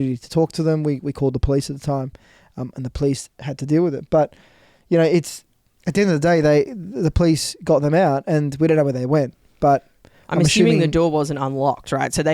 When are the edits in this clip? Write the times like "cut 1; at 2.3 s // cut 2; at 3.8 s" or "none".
none